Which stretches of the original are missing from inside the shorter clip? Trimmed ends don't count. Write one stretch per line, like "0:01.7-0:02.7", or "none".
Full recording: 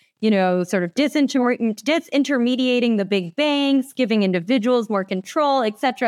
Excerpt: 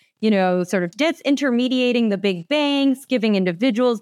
0:00.9-0:01.8